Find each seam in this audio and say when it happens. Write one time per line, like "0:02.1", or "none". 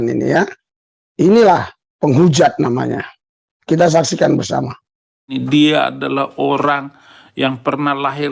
0:05.1